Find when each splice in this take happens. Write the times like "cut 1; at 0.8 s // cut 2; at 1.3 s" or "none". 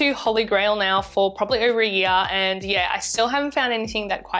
none